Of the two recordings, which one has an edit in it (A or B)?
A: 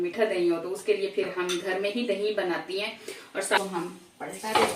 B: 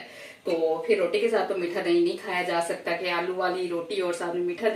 A